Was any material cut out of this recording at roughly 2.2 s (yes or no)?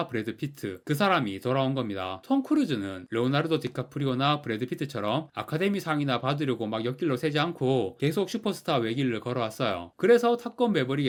no